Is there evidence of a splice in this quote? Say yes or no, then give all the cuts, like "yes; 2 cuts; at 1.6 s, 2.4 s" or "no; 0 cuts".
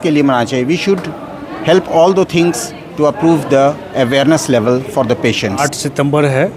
no; 0 cuts